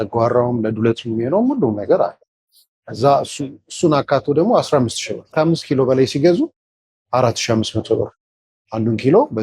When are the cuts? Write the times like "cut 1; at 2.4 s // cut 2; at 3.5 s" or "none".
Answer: cut 1; at 5.3 s